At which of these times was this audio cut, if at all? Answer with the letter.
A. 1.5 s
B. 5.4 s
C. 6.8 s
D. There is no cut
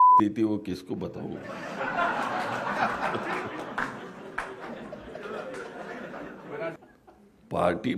C